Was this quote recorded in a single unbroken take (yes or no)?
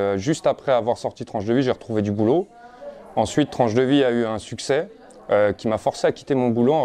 yes